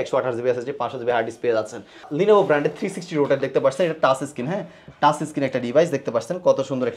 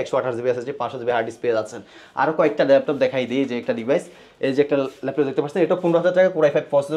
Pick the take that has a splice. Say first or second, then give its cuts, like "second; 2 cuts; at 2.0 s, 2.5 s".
first; 1 cut; at 2.1 s